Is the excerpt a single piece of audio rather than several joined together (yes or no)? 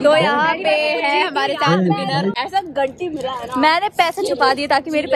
no